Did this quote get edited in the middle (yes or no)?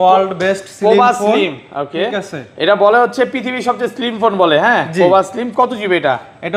no